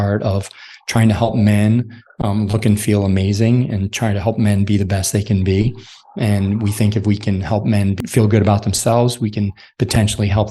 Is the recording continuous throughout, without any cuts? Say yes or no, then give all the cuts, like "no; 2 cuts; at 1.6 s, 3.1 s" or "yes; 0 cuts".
no; 1 cut; at 8.0 s